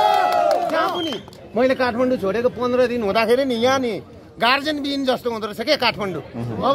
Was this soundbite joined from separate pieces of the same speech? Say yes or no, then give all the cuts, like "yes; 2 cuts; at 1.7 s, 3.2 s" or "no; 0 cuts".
yes; 1 cut; at 1.4 s